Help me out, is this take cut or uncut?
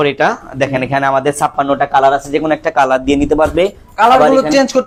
uncut